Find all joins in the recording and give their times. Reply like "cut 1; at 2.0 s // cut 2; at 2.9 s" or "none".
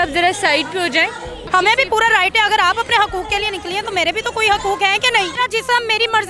cut 1; at 1.3 s // cut 2; at 5.3 s